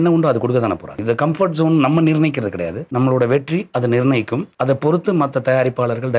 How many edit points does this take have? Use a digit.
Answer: 3